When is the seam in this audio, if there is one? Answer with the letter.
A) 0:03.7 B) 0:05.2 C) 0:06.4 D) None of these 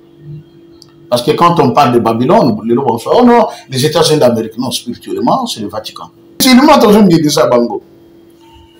C